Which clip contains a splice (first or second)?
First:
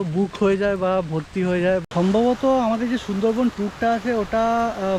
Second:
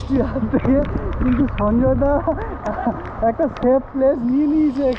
first